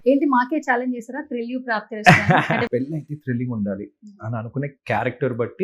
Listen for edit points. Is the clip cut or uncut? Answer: cut